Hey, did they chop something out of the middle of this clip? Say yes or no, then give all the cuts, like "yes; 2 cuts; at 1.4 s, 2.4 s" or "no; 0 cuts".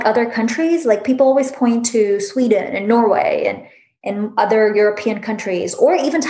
no; 0 cuts